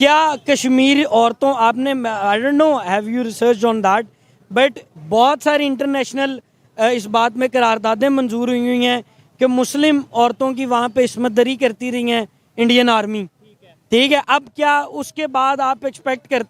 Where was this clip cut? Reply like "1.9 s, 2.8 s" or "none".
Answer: none